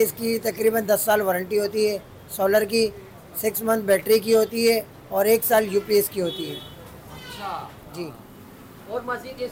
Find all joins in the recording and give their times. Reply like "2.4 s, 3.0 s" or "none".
8.3 s